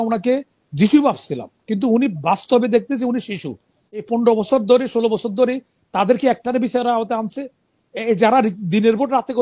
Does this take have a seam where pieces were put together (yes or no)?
yes